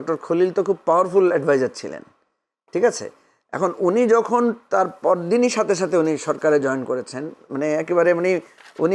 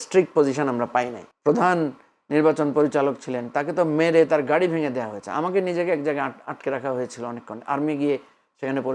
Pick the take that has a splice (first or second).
second